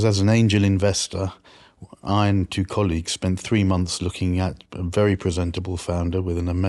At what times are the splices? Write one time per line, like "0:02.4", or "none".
none